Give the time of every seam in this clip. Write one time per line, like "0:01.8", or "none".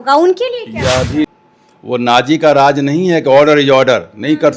0:01.4